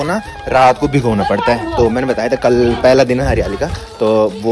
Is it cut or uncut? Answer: uncut